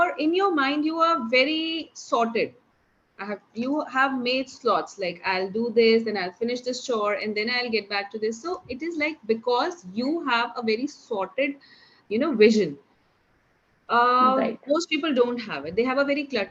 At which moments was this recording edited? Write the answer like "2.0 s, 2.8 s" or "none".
none